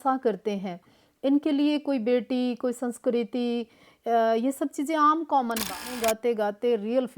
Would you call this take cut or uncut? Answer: cut